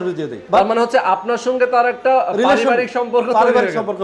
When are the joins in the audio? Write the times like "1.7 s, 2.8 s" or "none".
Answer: none

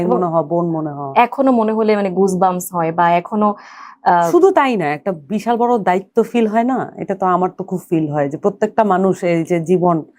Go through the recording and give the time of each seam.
none

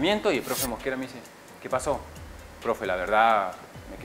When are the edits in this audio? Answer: none

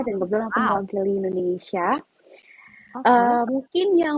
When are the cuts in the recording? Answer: none

